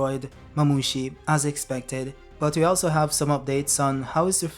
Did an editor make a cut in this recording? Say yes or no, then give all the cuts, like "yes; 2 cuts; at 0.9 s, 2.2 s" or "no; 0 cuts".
yes; 1 cut; at 2.2 s